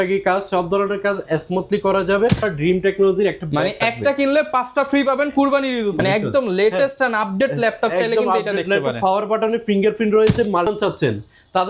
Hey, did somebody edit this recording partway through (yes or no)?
yes